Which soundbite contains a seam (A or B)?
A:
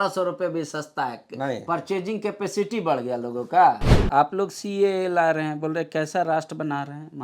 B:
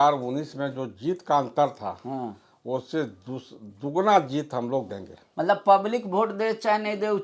A